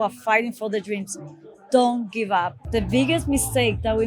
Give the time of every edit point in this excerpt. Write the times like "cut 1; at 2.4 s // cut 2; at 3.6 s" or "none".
cut 1; at 2.6 s